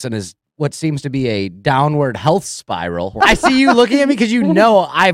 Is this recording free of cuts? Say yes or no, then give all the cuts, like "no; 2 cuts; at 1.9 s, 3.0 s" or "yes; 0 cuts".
no; 1 cut; at 3.1 s